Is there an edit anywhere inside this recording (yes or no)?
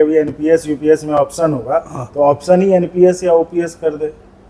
no